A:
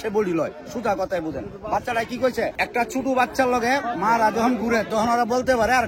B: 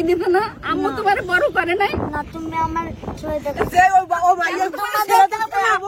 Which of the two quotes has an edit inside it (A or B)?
A